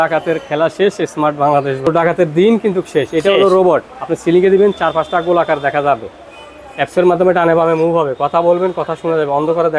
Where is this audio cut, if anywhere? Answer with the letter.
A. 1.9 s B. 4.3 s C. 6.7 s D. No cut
A